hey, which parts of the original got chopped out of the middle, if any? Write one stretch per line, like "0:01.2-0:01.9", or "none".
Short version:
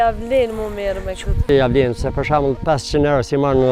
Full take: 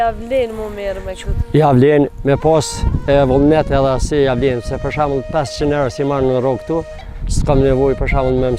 0:01.4-0:04.1